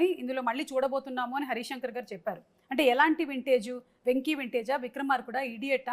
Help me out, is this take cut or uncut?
uncut